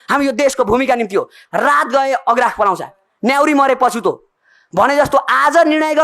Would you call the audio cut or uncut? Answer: cut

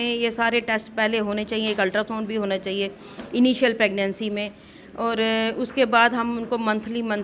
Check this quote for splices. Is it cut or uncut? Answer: uncut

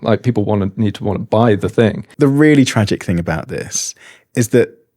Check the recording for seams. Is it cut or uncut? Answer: cut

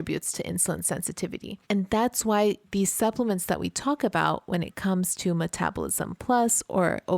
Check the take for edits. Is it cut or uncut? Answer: cut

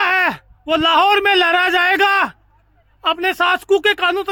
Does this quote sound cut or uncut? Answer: uncut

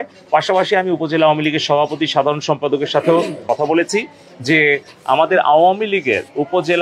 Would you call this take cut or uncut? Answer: cut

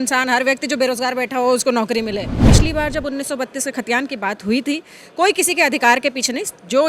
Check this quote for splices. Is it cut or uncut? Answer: cut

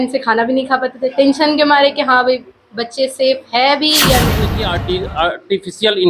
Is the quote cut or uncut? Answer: cut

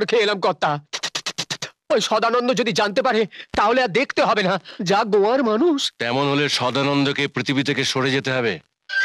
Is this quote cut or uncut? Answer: uncut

